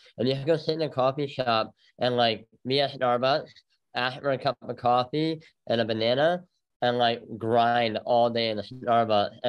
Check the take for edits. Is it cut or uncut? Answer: uncut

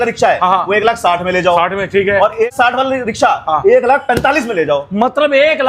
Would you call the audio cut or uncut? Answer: cut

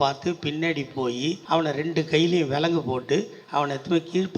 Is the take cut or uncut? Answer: cut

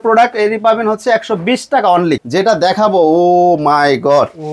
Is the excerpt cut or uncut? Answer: cut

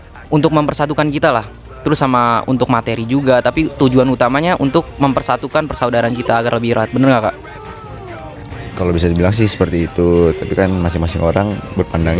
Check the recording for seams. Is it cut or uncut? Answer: uncut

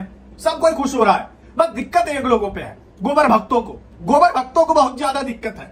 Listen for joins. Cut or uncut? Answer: uncut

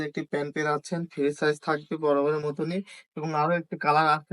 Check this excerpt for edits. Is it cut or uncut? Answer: uncut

